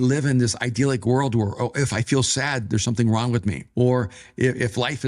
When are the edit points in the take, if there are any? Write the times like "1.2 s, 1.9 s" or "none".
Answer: 3.6 s